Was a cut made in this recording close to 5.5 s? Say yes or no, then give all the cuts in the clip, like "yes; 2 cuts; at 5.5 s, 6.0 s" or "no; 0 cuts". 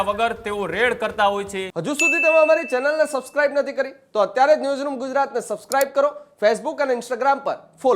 no; 1 cut; at 1.7 s